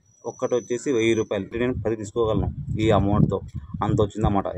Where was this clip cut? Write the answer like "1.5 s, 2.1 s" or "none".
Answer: 1.5 s